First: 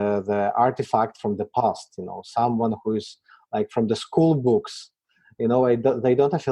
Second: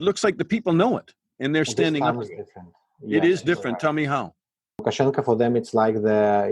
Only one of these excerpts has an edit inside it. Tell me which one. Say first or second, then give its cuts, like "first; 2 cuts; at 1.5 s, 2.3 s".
second; 1 cut; at 4.8 s